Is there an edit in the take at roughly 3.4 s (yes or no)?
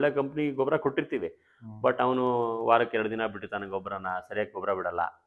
no